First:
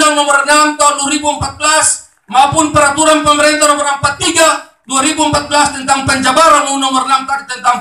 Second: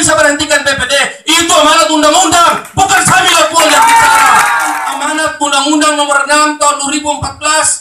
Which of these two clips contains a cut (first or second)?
second